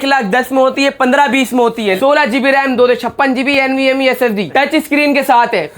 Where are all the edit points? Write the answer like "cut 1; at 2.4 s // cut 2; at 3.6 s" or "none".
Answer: cut 1; at 2.0 s // cut 2; at 4.5 s